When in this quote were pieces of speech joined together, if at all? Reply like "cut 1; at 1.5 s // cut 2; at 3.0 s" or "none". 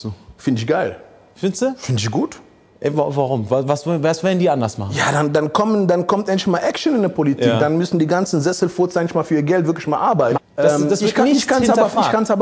cut 1; at 10.4 s